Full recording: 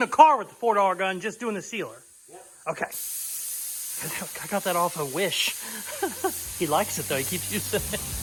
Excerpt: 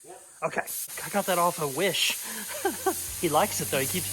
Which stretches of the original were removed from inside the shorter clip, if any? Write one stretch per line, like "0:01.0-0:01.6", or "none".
0:03.2-0:04.4